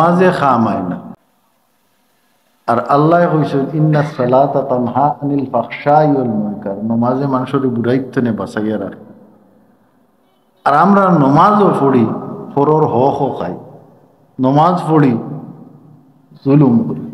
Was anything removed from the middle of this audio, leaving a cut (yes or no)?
yes